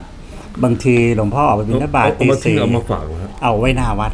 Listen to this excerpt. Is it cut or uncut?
uncut